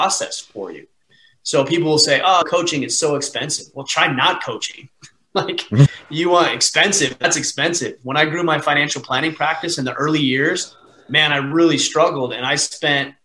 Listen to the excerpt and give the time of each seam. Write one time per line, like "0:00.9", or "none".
none